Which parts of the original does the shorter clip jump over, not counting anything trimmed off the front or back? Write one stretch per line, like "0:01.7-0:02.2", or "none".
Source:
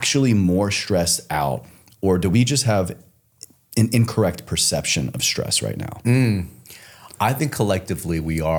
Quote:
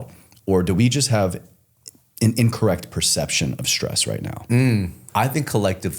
0:06.5-0:07.0